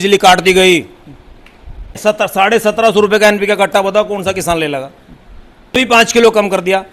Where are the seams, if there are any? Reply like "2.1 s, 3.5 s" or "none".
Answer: 2.0 s, 5.8 s